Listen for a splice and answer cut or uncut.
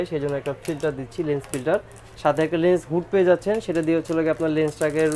uncut